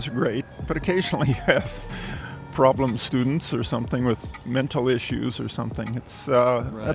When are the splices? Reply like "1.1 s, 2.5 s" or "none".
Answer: none